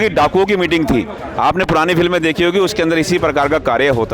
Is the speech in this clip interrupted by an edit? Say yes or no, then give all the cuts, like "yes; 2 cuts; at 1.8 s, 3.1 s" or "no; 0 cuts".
no; 0 cuts